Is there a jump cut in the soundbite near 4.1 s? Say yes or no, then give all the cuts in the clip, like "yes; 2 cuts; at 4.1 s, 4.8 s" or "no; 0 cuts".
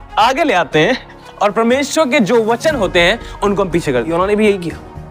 yes; 1 cut; at 4.1 s